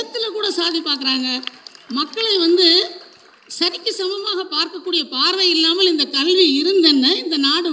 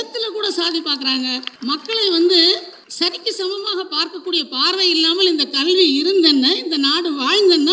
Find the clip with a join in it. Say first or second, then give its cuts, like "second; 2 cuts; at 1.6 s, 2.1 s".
second; 2 cuts; at 1.5 s, 2.8 s